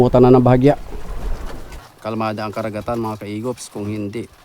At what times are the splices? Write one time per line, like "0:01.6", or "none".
0:01.9